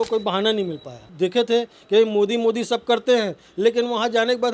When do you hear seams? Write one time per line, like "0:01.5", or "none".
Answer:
0:01.0